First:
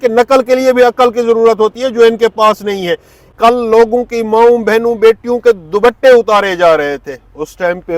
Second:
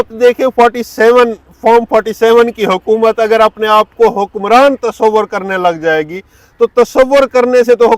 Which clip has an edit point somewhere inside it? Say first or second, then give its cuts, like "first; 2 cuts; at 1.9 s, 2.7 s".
first; 1 cut; at 3.4 s